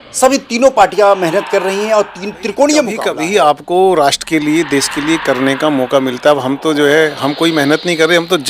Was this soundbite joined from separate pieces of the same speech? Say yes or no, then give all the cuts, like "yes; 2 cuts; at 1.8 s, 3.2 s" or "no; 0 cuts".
yes; 1 cut; at 3.0 s